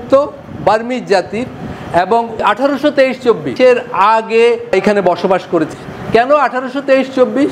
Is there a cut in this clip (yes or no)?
yes